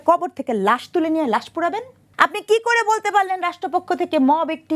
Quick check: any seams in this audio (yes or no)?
yes